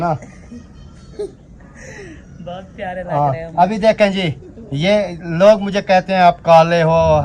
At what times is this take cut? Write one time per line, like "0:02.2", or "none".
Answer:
none